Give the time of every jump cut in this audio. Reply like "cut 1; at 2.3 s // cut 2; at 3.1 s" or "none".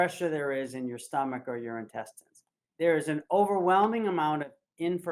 cut 1; at 2.6 s